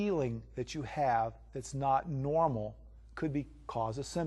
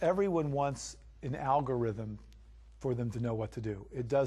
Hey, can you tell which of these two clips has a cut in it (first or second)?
first